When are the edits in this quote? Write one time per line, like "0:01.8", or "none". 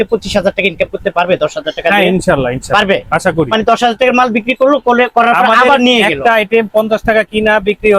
none